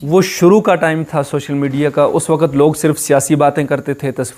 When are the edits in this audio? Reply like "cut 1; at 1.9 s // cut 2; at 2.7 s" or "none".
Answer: none

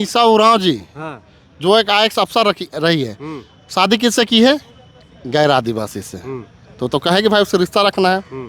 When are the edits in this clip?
none

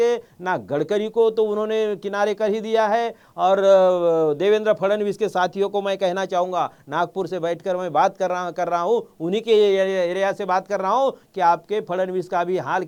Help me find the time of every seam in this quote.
none

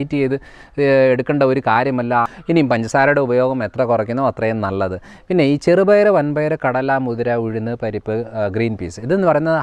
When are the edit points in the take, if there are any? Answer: cut 1; at 2.3 s

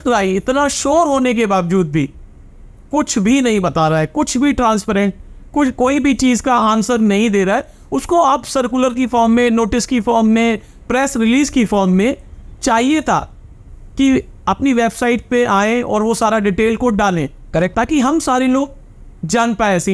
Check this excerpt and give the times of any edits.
none

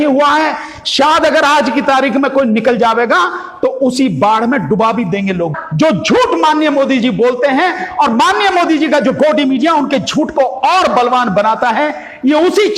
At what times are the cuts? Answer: cut 1; at 5.5 s

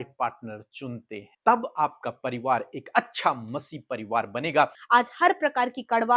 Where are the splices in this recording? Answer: cut 1; at 1.3 s // cut 2; at 4.8 s

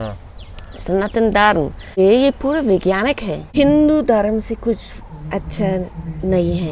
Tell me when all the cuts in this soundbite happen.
cut 1; at 1.9 s // cut 2; at 3.3 s

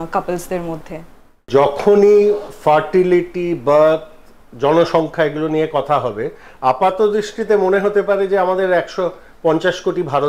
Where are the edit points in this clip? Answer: cut 1; at 1.5 s

